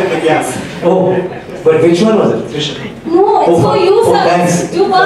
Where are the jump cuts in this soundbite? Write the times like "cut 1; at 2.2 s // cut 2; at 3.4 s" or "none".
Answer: none